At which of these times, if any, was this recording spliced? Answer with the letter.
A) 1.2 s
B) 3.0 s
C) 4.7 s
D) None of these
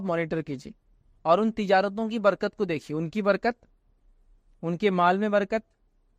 D